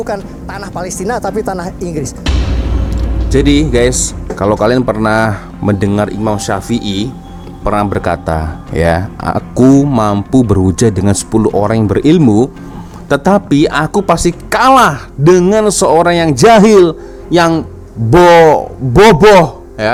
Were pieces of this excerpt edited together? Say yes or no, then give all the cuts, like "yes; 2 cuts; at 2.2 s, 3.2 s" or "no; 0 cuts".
no; 0 cuts